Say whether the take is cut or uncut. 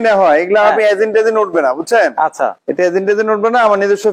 cut